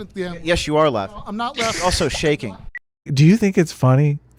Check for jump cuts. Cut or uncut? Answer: cut